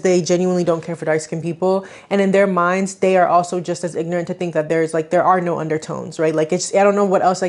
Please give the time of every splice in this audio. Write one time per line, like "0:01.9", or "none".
none